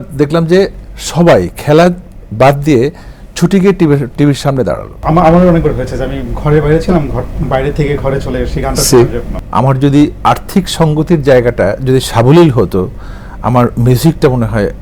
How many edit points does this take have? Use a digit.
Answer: 2